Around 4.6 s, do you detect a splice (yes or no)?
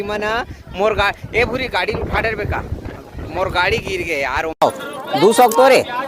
yes